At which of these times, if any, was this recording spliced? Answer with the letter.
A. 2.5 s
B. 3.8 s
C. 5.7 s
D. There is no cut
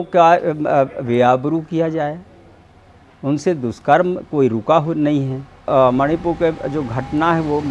C